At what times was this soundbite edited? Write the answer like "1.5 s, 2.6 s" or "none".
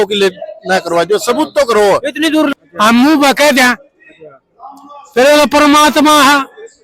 2.5 s